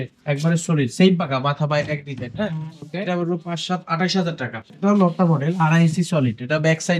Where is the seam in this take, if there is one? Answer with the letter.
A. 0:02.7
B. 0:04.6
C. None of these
B